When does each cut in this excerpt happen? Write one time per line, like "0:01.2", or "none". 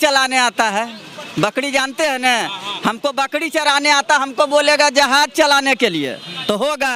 none